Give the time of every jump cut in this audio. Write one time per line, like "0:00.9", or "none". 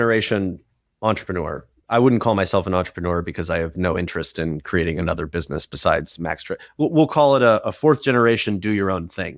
0:01.7

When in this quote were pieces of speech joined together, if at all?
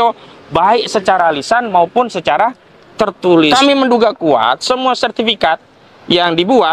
0:03.5

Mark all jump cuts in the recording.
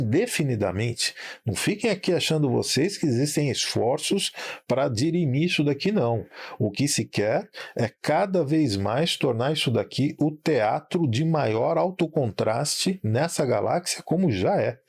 0:13.9

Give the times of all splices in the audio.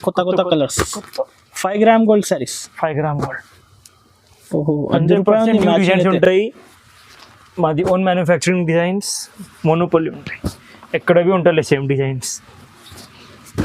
none

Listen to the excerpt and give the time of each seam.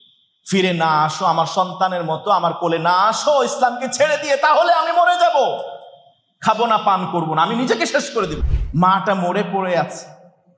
0:08.4

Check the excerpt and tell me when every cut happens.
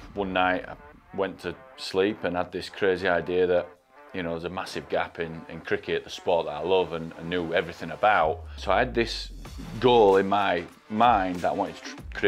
0:08.6

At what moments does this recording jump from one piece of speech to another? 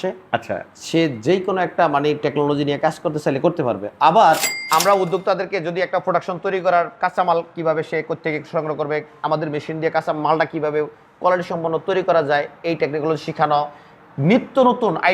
0:04.5

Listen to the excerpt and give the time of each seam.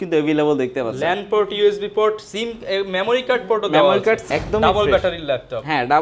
0:04.2

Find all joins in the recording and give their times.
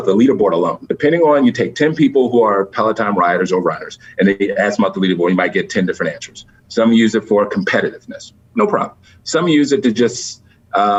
none

